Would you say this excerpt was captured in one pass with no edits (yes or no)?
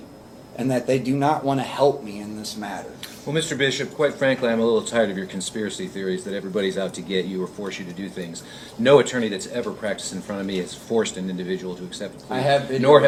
yes